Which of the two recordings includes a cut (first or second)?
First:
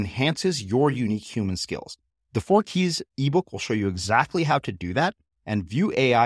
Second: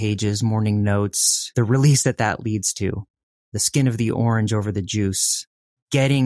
second